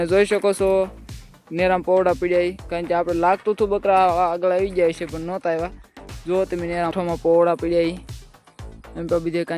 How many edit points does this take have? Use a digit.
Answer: 1